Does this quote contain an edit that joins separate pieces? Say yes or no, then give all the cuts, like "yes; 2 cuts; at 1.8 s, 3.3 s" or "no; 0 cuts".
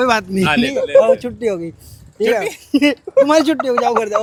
no; 0 cuts